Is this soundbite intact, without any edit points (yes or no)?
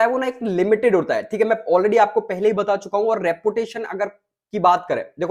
yes